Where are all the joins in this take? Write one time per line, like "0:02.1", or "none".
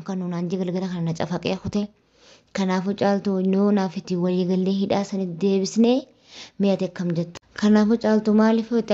0:07.4